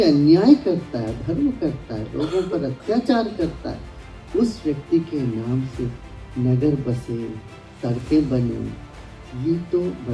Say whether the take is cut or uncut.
uncut